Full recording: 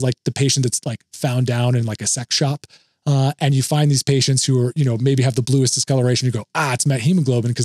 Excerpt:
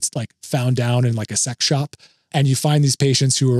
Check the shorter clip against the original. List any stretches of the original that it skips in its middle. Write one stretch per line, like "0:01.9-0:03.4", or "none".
0:03.0-0:03.4